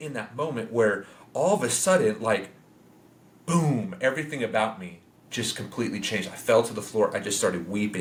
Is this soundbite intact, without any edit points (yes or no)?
yes